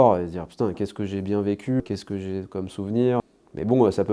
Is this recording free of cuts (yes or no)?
no